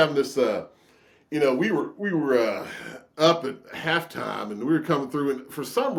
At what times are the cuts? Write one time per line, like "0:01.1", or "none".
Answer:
none